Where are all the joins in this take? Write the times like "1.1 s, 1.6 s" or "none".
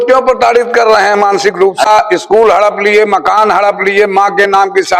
1.9 s